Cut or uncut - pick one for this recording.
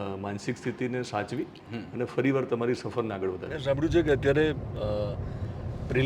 cut